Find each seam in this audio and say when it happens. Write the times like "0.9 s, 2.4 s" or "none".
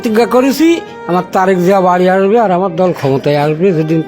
0.9 s